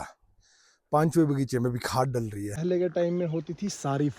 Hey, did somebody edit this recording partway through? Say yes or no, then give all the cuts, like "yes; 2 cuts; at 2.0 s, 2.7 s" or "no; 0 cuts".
yes; 1 cut; at 2.6 s